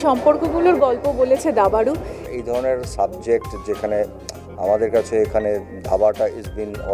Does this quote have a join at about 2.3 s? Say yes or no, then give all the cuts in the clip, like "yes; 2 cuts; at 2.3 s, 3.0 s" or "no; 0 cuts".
yes; 1 cut; at 2.3 s